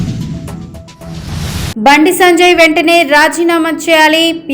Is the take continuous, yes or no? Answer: no